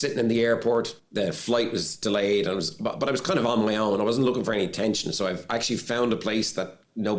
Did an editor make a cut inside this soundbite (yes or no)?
yes